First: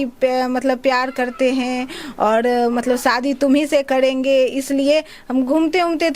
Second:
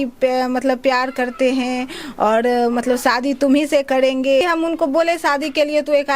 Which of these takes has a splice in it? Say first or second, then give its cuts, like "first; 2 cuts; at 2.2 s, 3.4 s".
second; 1 cut; at 4.4 s